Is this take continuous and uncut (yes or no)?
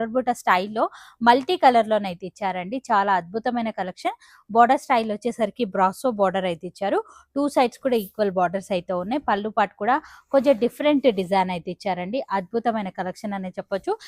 yes